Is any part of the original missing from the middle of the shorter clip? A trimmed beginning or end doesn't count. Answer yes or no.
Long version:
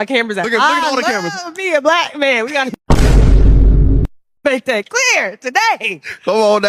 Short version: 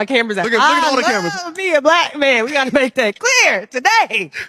yes